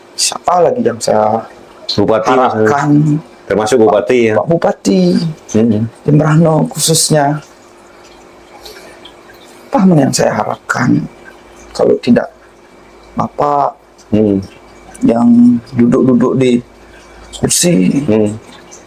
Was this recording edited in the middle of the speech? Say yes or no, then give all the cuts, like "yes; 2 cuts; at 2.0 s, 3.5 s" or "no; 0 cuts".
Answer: no; 0 cuts